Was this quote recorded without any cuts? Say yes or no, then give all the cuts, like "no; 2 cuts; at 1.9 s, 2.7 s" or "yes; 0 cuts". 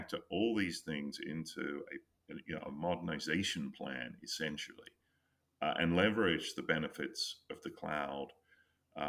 yes; 0 cuts